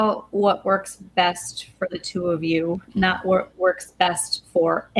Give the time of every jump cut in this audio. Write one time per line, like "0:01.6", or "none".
none